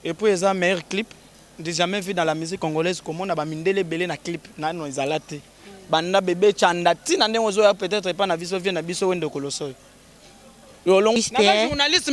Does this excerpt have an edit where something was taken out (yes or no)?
yes